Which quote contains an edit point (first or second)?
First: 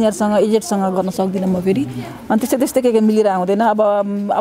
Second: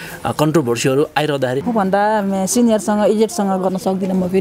second